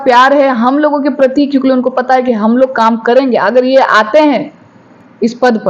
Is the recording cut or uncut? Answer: uncut